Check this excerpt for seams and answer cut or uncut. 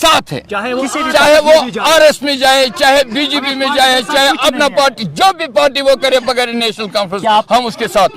uncut